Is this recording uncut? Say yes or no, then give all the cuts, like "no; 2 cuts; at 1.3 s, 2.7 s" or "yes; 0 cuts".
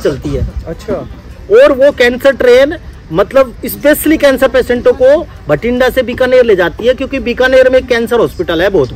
yes; 0 cuts